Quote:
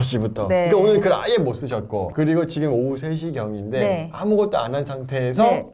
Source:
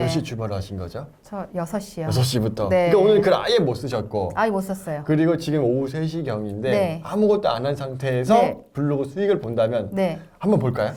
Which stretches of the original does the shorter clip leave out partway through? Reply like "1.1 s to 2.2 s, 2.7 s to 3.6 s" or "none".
4.3 s to 5.0 s